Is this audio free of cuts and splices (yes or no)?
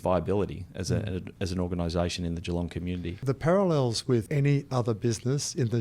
no